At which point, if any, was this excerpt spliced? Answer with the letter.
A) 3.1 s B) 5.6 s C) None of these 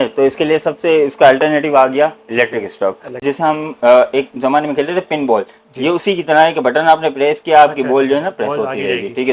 A